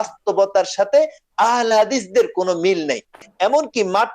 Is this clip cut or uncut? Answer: cut